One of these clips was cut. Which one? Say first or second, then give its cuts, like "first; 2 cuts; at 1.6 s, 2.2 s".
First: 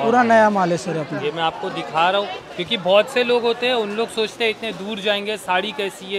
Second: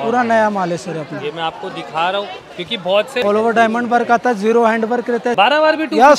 second; 2 cuts; at 3.2 s, 5.3 s